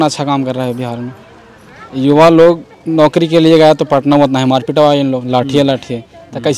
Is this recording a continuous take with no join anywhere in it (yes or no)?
yes